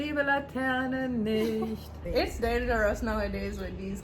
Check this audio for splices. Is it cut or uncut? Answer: cut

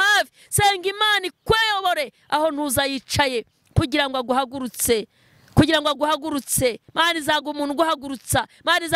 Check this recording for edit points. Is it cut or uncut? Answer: uncut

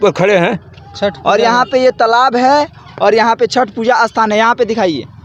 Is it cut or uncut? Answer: uncut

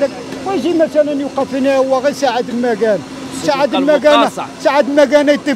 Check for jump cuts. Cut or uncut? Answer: uncut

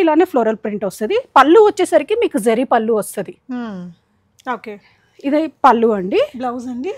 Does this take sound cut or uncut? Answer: uncut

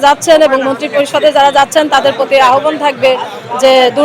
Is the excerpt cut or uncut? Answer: uncut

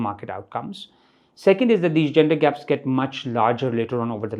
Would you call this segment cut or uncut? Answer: uncut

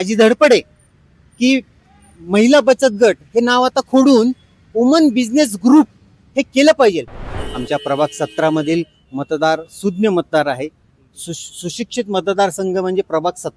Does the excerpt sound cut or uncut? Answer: cut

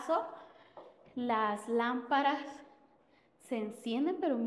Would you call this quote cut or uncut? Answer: uncut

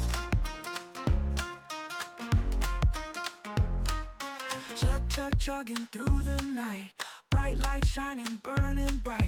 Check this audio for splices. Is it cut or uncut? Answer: uncut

